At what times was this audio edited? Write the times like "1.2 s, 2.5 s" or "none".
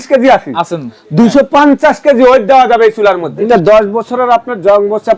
3.5 s